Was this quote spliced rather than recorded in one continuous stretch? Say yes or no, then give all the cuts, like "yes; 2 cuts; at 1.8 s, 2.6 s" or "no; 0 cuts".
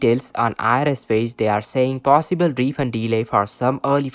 no; 0 cuts